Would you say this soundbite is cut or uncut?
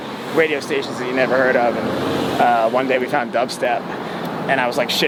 uncut